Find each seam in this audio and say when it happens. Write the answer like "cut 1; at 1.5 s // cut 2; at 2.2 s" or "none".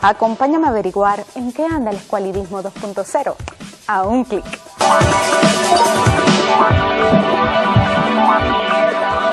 cut 1; at 7.5 s